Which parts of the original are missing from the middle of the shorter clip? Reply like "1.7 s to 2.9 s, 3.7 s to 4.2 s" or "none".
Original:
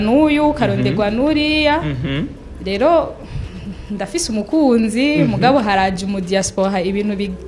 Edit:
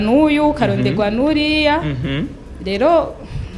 none